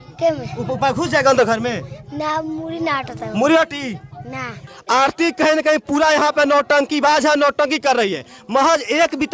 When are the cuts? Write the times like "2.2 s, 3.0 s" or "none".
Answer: 4.7 s